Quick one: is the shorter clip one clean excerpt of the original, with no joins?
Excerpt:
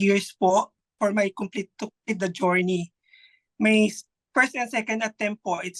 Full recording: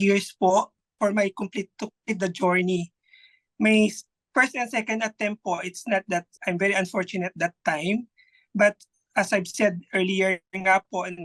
yes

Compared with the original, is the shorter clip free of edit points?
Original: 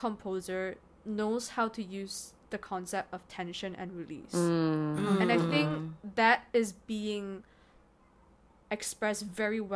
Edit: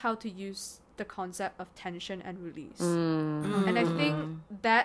yes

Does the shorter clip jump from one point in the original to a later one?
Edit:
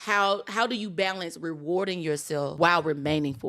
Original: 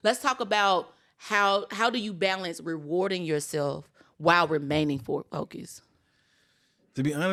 yes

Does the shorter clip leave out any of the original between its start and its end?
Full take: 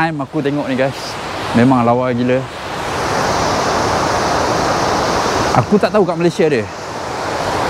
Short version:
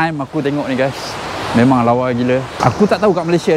yes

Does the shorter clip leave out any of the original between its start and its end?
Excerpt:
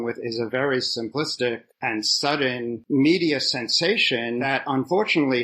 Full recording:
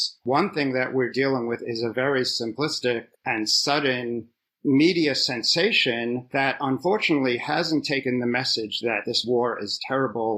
yes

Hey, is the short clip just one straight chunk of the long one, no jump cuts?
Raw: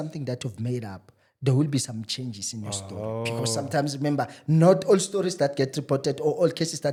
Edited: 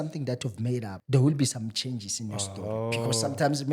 no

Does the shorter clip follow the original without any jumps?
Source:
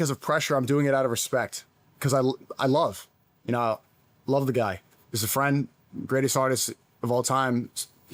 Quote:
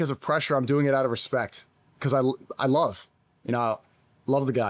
yes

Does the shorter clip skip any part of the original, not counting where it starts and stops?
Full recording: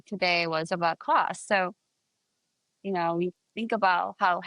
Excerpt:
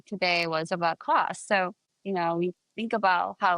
yes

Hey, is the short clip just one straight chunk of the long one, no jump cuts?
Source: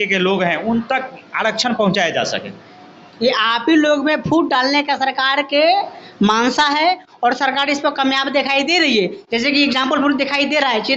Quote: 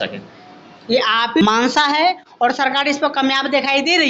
no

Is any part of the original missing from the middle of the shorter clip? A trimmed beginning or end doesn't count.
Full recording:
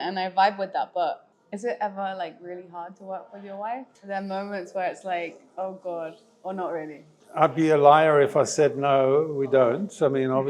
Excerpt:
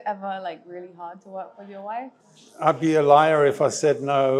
yes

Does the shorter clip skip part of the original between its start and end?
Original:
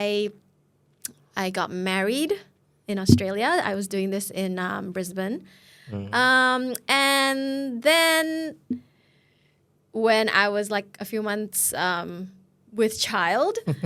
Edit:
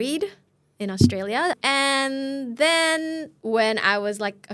yes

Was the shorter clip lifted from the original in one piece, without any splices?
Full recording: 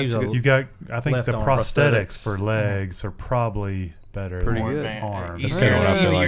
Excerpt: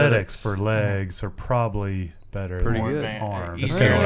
yes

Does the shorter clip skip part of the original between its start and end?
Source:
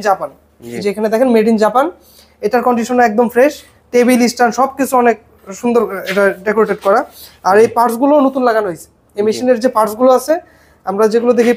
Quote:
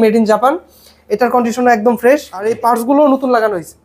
yes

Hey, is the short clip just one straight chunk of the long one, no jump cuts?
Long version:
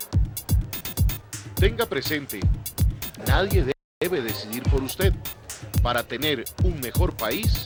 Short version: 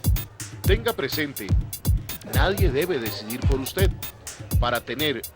no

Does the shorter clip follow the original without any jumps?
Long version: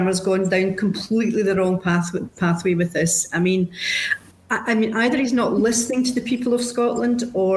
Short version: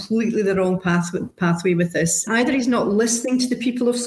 no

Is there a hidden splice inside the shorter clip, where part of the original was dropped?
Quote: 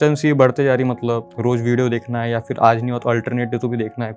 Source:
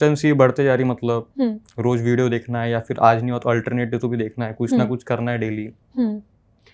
yes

